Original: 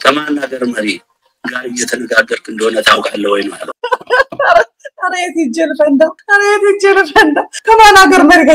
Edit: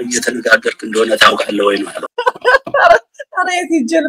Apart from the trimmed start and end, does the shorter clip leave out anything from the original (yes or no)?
no